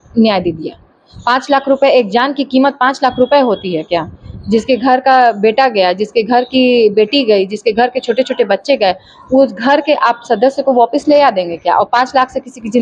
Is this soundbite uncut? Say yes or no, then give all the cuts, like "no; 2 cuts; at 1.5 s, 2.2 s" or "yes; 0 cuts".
yes; 0 cuts